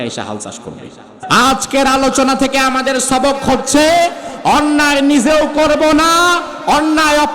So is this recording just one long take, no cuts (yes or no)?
no